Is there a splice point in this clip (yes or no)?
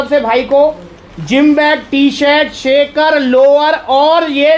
no